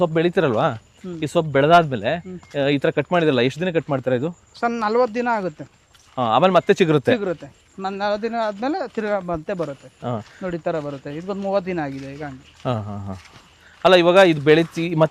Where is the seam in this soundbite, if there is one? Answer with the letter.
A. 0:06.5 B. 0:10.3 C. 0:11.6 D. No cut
D